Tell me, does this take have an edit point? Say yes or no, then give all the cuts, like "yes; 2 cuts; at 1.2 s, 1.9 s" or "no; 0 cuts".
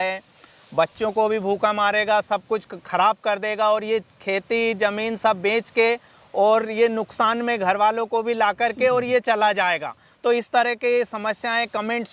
no; 0 cuts